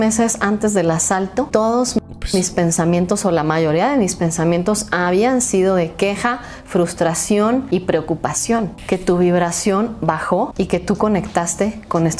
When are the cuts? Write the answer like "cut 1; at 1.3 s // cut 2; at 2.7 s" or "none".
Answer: cut 1; at 1.5 s // cut 2; at 7.7 s // cut 3; at 8.8 s // cut 4; at 10.5 s